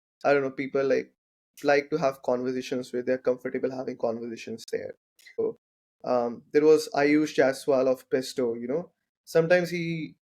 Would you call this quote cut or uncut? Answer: cut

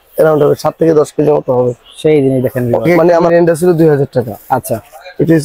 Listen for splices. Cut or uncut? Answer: cut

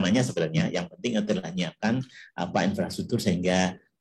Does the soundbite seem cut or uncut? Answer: uncut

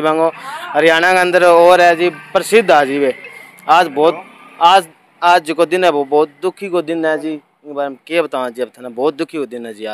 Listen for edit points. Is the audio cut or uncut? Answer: uncut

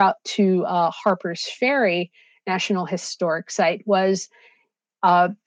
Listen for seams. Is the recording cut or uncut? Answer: uncut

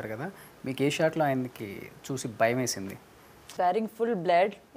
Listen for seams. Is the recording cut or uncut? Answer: cut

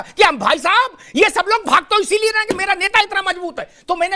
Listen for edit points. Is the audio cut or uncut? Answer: uncut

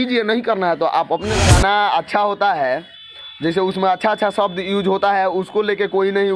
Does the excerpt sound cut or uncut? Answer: cut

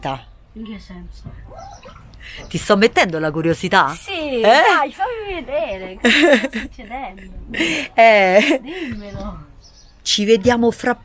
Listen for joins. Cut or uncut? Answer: uncut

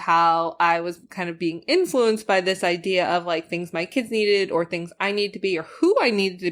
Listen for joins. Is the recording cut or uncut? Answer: uncut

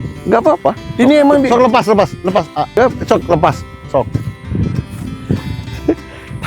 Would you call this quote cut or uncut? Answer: cut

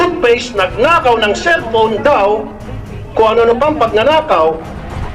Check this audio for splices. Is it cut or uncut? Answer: uncut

